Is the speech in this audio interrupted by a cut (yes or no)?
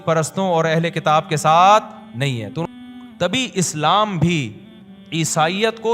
yes